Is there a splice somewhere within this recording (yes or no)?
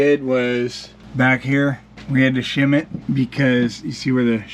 no